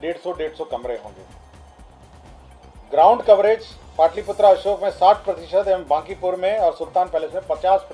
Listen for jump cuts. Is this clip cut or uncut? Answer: uncut